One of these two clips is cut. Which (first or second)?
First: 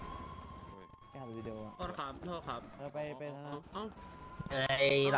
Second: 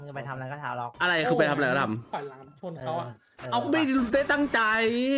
second